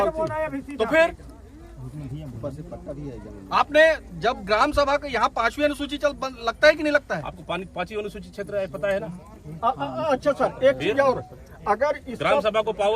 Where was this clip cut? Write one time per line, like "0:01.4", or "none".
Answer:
none